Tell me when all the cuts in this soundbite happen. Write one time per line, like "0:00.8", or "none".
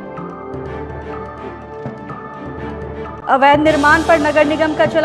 0:03.2